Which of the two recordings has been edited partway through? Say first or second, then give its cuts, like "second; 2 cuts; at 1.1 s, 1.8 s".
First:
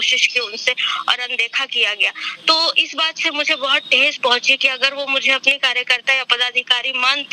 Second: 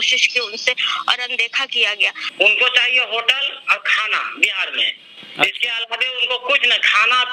second; 1 cut; at 2.2 s